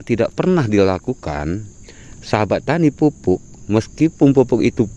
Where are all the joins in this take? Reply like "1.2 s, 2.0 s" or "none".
none